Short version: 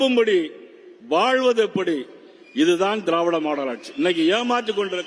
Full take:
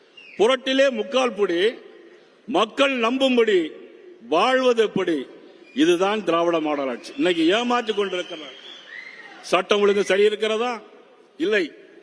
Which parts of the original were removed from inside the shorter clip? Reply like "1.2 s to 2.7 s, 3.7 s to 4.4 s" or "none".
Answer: none